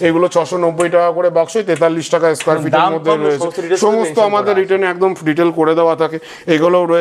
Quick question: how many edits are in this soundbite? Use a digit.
0